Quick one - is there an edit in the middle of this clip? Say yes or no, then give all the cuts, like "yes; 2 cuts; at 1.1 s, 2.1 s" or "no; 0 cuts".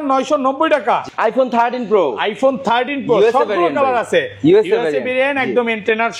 yes; 1 cut; at 1.1 s